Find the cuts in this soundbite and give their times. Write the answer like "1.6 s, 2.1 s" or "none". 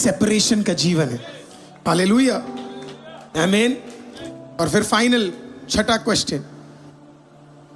none

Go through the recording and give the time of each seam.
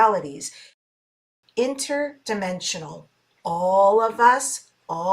1.1 s

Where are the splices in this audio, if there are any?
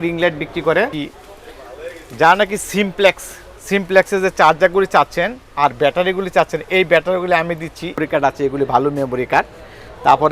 1.0 s, 8.0 s

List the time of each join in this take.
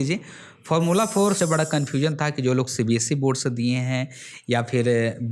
1.4 s

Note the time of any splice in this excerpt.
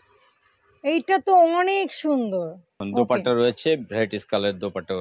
2.8 s

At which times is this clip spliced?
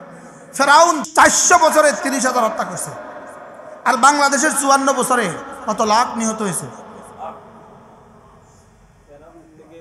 1.0 s

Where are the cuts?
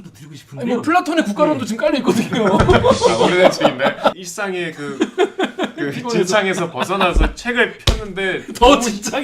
4.2 s

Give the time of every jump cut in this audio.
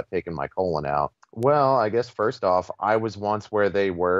1.2 s

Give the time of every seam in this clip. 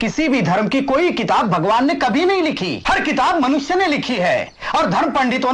2.7 s

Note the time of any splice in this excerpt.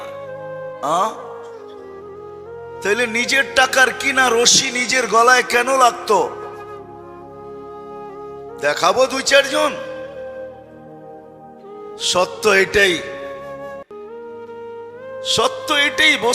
1.3 s, 2.8 s, 13.0 s, 14.6 s

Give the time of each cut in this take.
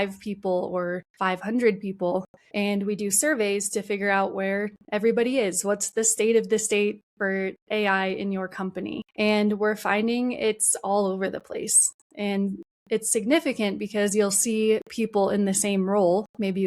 1.1 s, 2.4 s, 9.0 s

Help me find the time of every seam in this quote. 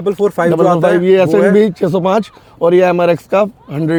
none

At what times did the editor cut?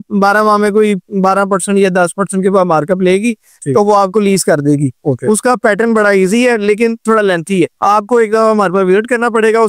none

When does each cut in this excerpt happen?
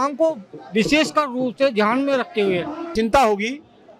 2.9 s

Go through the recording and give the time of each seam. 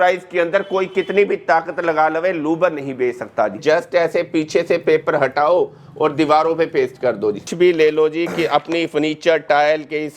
3.6 s, 7.5 s

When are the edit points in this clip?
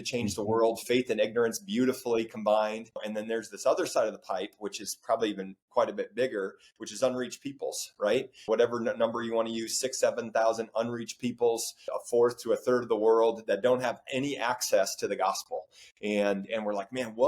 3.1 s, 8.5 s, 11.8 s

